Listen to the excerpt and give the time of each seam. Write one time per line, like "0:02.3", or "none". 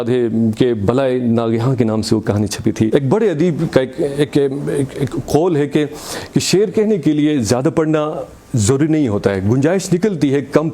0:02.9